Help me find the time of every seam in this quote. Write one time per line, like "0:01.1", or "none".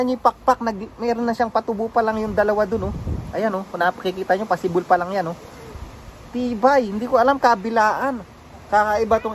none